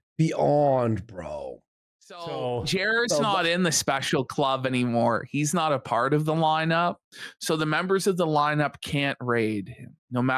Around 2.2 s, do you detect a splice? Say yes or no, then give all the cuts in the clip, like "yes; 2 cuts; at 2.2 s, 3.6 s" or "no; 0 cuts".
yes; 1 cut; at 2.2 s